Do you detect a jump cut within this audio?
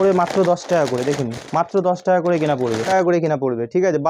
yes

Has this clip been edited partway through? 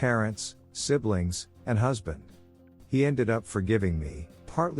yes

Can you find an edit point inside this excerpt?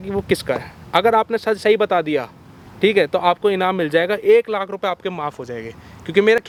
no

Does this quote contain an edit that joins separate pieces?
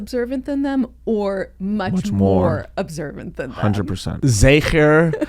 yes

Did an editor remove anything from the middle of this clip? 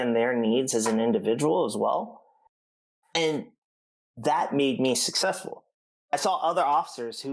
no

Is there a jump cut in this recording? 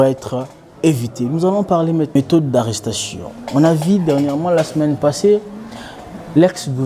yes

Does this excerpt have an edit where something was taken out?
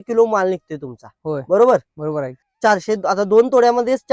yes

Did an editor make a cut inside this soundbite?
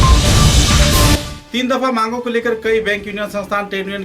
yes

